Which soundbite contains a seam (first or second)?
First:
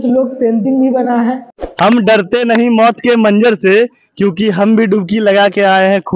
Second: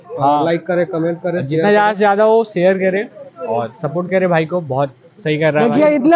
first